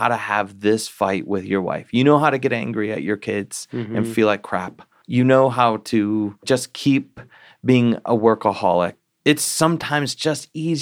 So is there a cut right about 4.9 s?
yes; 3 cuts; at 4.9 s, 6.4 s, 9.0 s

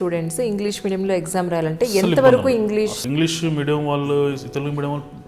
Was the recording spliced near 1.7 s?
no; 1 cut; at 3.0 s

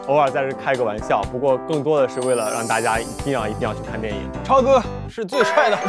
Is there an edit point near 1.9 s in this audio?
no; 0 cuts

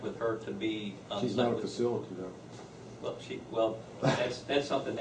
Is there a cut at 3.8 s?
no; 0 cuts

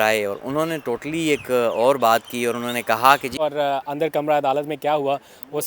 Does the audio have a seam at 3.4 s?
yes; 1 cut; at 3.4 s

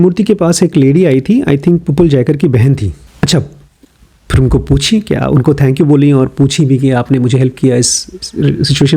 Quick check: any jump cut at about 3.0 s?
yes; 1 cut; at 3.0 s

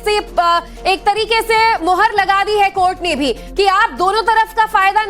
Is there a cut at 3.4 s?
yes; 1 cut; at 3.4 s

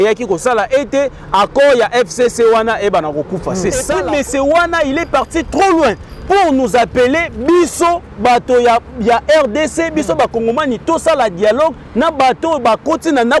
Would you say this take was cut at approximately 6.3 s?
no; 1 cut; at 3.9 s

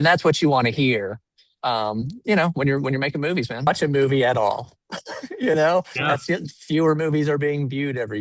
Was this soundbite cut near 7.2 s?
no; 1 cut; at 3.7 s

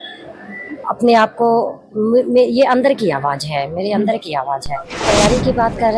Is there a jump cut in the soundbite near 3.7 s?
no; 1 cut; at 5.0 s

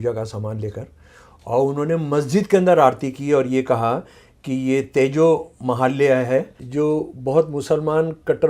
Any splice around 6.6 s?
yes; 1 cut; at 6.6 s

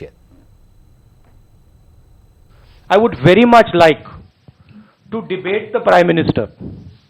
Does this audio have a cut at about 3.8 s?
no; 0 cuts

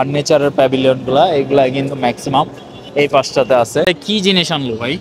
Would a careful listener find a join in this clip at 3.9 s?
yes; 1 cut; at 3.9 s

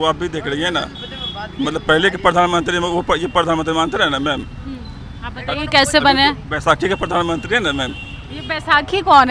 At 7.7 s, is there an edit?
no; 0 cuts

